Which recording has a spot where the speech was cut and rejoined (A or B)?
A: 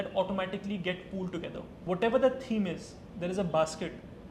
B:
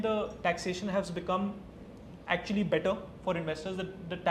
A